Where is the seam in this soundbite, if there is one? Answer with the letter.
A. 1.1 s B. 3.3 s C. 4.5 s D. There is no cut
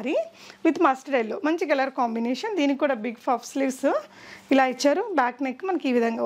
D